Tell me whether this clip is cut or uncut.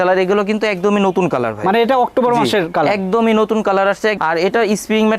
cut